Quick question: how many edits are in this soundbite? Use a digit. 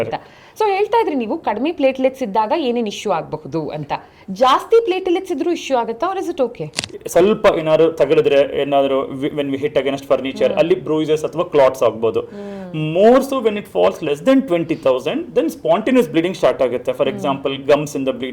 1